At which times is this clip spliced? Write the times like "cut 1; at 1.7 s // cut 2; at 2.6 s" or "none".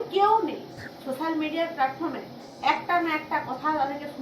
cut 1; at 0.9 s